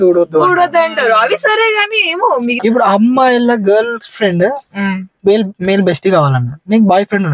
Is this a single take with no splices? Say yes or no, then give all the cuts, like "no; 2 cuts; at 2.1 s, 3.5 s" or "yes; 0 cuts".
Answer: no; 1 cut; at 2.6 s